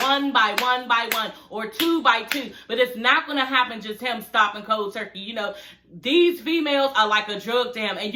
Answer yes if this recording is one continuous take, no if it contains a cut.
yes